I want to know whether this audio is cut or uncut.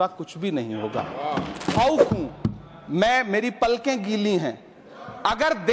cut